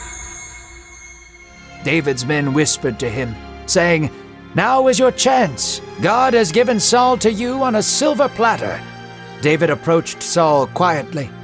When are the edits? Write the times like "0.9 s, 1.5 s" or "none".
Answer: 1.3 s